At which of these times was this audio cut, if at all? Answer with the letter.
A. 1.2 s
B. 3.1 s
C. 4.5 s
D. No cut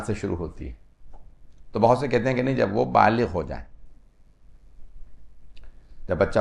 D